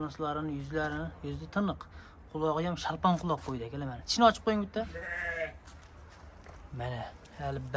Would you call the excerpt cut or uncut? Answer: uncut